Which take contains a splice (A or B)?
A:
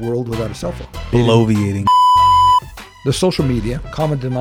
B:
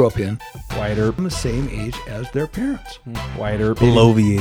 A